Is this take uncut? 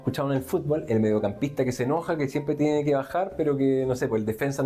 yes; 0 cuts

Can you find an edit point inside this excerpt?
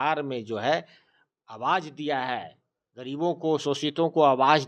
no; 0 cuts

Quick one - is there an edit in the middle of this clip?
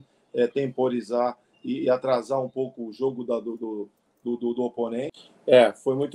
yes; 1 cut; at 5.3 s

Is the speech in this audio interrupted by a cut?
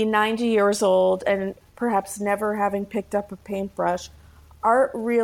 no; 0 cuts

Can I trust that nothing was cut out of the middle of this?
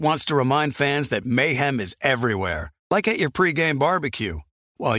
yes; 0 cuts

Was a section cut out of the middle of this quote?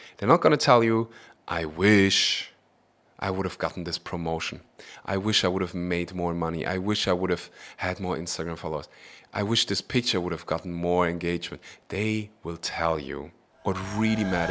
no; 0 cuts

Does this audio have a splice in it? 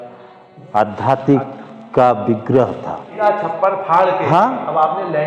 yes; 1 cut; at 3.2 s

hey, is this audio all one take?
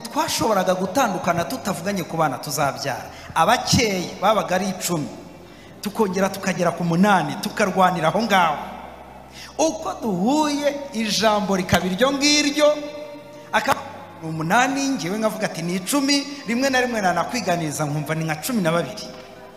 yes; 0 cuts

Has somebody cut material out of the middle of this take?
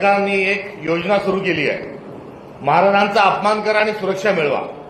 no; 0 cuts

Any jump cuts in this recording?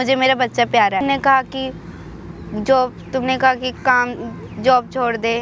no; 0 cuts

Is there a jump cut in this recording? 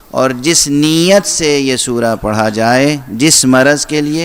no; 0 cuts

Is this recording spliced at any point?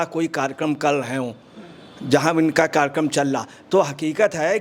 no; 0 cuts

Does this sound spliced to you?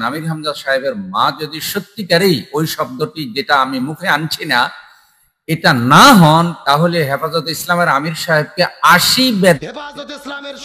yes; 1 cut; at 9.6 s

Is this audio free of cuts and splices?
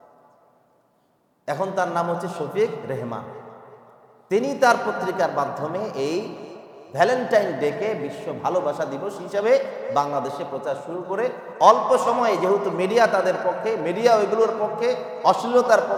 yes; 0 cuts

